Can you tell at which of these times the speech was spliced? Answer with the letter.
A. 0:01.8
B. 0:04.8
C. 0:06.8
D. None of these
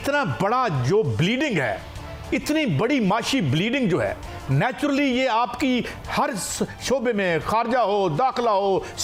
D